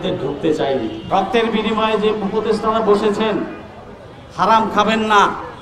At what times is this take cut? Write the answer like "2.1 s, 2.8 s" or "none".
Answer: 1.0 s